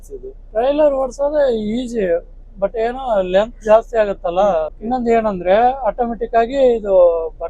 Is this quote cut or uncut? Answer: cut